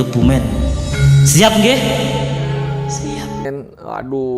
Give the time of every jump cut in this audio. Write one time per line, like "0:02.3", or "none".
0:03.5